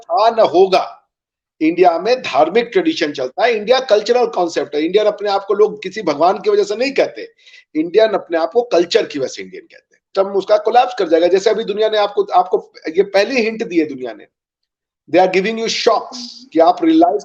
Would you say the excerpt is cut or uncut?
cut